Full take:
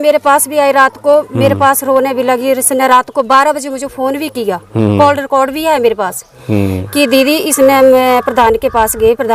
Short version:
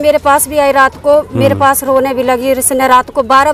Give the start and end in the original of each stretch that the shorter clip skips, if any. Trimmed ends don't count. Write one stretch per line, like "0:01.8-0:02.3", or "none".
none